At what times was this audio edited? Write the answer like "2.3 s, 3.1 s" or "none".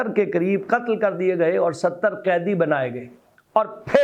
none